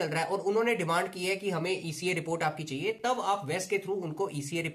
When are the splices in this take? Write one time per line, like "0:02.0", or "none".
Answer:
none